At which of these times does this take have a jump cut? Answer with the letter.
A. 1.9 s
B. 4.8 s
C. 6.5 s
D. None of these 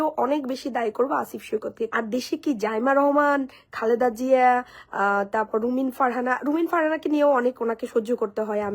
A